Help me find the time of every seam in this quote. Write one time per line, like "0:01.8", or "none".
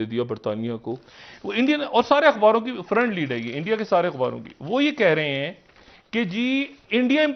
0:00.9